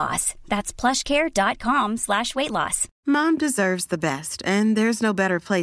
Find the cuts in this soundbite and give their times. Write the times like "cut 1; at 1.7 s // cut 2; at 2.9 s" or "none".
cut 1; at 2.8 s